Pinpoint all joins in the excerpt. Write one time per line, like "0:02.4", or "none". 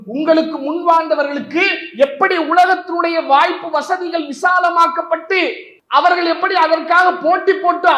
0:05.7

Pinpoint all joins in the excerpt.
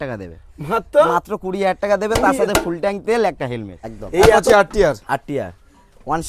0:04.4

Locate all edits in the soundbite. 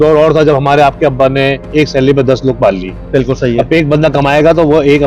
none

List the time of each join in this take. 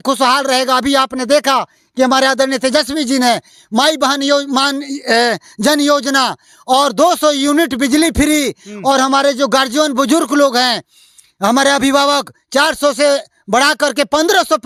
none

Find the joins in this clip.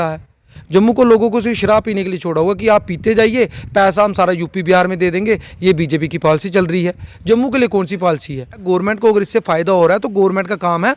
0:08.6

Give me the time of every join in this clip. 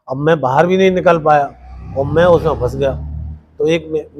none

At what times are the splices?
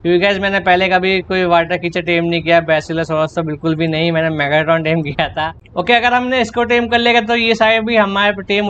0:05.6

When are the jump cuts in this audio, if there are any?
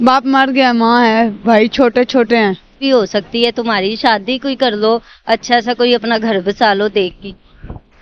0:02.8

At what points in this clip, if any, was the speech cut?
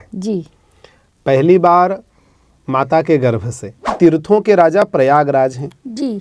0:03.8

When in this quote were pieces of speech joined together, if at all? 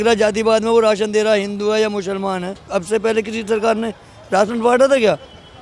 0:02.7

